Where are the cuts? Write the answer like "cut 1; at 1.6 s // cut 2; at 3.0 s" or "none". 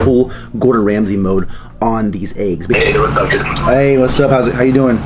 cut 1; at 2.7 s